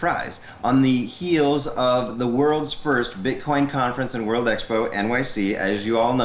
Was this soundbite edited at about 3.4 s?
no; 1 cut; at 5.3 s

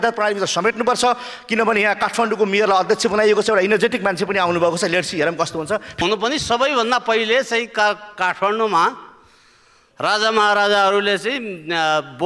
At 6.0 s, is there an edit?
yes; 1 cut; at 6.0 s

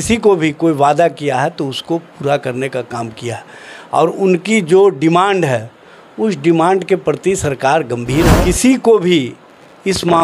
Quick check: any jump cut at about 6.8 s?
no; 1 cut; at 8.3 s

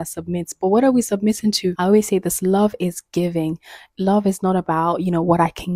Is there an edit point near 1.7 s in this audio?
yes; 1 cut; at 1.7 s

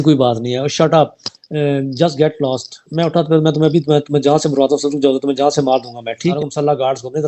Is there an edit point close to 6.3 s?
yes; 1 cut; at 6.3 s

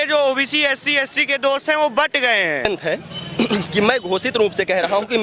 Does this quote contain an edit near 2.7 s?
yes; 1 cut; at 2.7 s

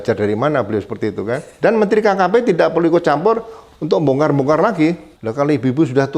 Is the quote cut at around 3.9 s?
no; 2 cuts; at 1.5 s, 5.1 s

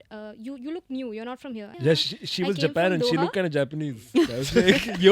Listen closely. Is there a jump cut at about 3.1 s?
no; 1 cut; at 1.7 s

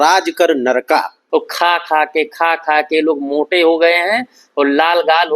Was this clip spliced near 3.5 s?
no; 1 cut; at 1.2 s

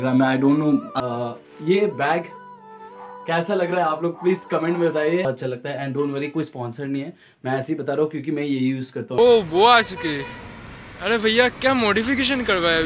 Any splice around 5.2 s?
yes; 3 cuts; at 0.9 s, 5.2 s, 9.2 s

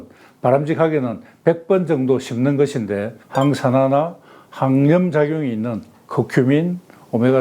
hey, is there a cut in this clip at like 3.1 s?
yes; 1 cut; at 3.1 s

